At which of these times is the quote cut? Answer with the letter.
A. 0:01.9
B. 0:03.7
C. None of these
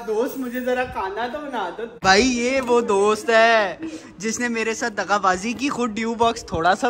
A